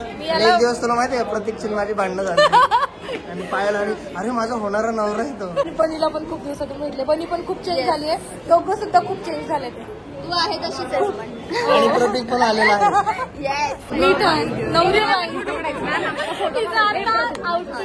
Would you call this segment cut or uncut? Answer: cut